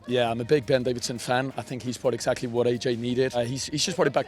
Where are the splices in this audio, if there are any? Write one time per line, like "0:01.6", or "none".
0:03.4